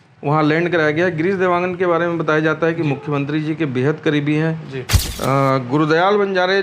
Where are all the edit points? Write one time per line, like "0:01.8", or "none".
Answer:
0:04.9